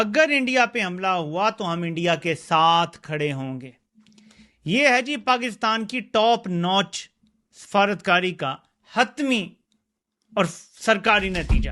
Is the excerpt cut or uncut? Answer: uncut